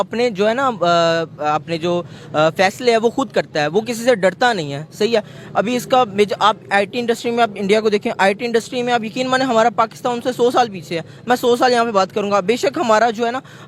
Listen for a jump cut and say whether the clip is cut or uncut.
uncut